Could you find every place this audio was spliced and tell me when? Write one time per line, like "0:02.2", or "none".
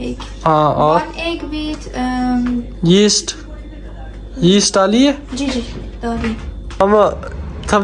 0:06.6